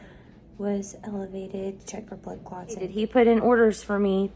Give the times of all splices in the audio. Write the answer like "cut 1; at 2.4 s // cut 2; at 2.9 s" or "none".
cut 1; at 3.0 s